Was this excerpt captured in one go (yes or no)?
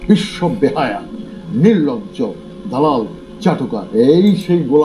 yes